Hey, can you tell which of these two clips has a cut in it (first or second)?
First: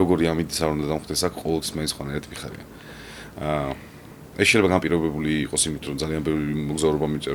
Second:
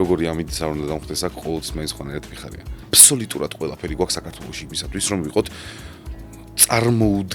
second